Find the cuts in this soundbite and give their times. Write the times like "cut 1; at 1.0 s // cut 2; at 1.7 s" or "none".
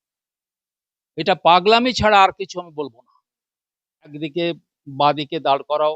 cut 1; at 4.1 s